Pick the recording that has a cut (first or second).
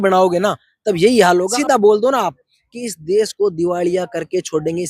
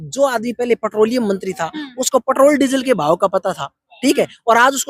first